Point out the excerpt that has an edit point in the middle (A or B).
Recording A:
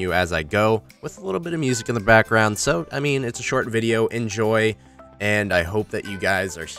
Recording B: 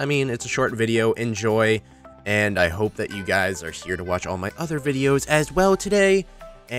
A